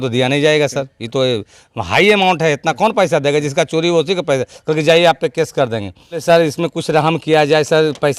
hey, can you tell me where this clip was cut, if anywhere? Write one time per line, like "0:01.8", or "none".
0:06.2